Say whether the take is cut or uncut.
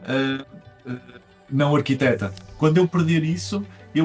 cut